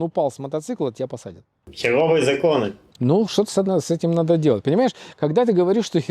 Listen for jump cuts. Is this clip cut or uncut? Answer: uncut